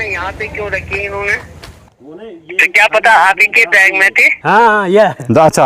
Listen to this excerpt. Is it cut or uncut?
cut